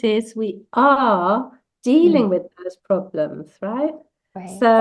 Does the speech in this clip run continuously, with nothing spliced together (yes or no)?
yes